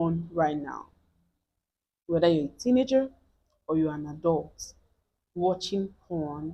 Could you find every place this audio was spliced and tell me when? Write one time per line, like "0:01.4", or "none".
none